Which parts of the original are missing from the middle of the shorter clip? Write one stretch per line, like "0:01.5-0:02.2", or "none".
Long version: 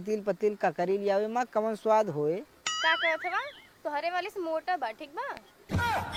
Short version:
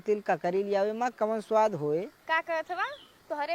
0:02.5-0:02.7